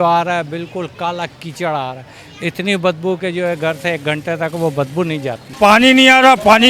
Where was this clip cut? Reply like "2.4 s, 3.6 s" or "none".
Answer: 5.4 s